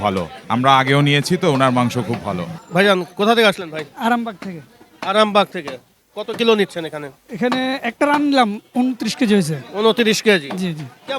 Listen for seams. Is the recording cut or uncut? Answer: uncut